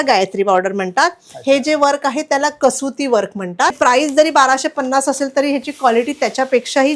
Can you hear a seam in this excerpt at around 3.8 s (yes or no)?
yes